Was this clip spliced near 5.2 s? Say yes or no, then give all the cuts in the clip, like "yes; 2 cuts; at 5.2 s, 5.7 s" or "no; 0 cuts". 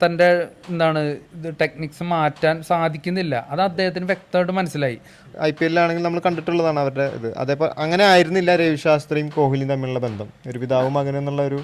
yes; 1 cut; at 5.2 s